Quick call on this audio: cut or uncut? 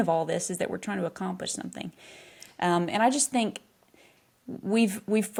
uncut